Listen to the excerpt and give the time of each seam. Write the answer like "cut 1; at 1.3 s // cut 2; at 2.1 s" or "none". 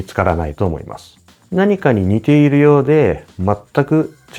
none